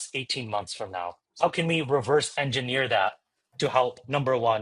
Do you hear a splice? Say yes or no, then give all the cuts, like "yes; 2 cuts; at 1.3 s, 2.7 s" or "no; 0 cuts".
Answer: no; 0 cuts